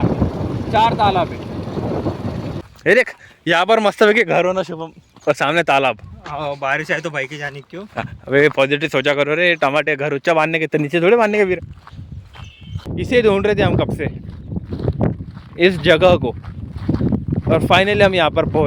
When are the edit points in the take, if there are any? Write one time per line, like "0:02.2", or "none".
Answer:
0:02.6
0:12.9